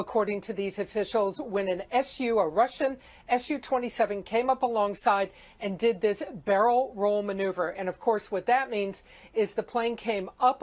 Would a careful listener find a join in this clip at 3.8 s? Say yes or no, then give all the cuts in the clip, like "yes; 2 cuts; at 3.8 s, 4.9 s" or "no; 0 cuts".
no; 1 cut; at 8.8 s